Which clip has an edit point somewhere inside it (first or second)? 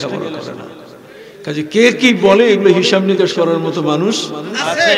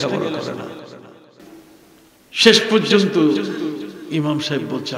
second